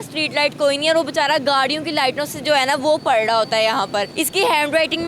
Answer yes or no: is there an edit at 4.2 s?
yes